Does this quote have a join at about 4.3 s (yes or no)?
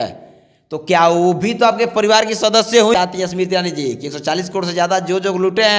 no